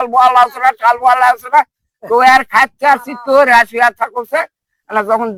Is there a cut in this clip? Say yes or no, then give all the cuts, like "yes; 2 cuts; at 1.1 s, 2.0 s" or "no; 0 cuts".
no; 0 cuts